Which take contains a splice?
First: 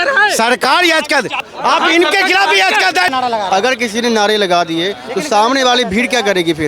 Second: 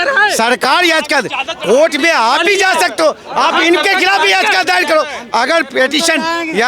first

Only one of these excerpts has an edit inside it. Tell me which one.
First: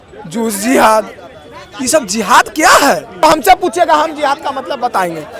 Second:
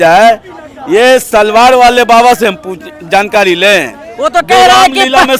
first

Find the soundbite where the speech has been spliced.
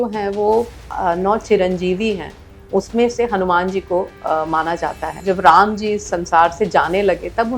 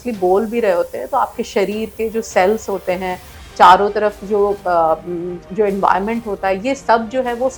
first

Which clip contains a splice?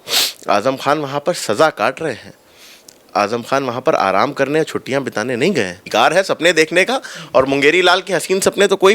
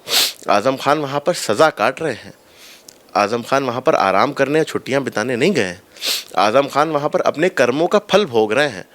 first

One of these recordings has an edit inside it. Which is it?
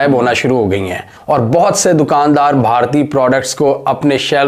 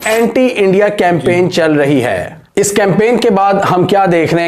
second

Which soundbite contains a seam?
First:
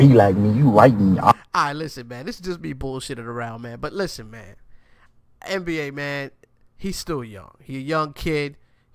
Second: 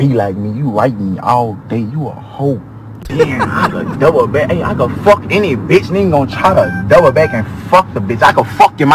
second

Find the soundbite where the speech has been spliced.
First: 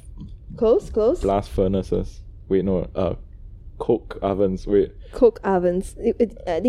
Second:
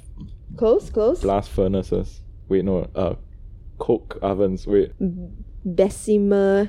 second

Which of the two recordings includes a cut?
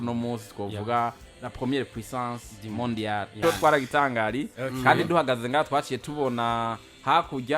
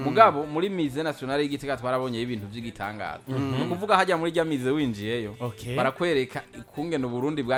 first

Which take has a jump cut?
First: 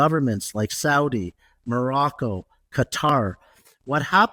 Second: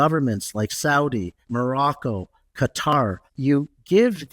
second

